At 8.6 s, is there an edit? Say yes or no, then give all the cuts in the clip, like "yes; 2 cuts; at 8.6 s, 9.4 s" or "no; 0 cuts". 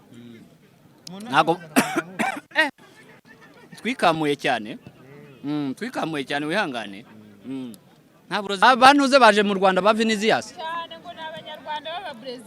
yes; 1 cut; at 8.6 s